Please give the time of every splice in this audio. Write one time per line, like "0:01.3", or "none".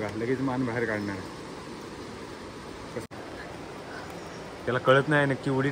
0:03.0